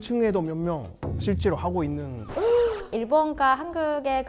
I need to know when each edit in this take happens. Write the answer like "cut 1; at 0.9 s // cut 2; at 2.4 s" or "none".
cut 1; at 2.2 s // cut 2; at 2.9 s